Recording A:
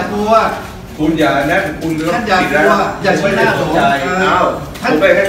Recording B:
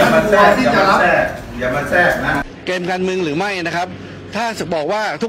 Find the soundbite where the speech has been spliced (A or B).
B